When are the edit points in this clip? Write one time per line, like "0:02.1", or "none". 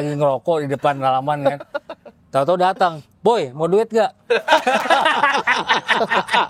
none